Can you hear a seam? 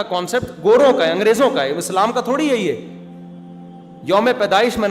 no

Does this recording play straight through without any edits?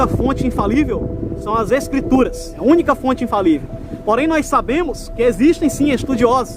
no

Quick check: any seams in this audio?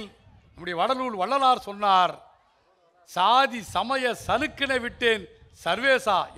no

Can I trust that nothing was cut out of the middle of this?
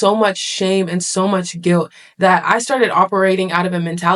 yes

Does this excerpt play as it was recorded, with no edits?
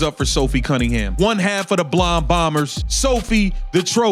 no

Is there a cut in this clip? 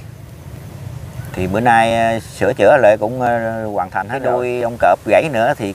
yes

